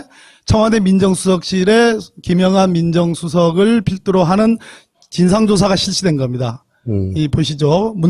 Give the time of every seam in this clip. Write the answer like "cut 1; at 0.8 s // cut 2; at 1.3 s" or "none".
cut 1; at 1.1 s